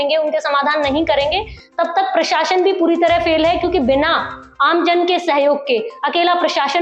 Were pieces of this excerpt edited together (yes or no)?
no